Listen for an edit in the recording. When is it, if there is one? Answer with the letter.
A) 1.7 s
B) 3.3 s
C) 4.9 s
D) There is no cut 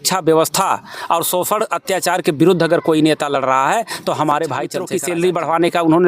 C